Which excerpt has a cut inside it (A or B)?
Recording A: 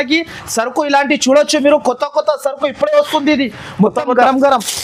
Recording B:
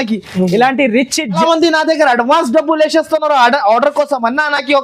B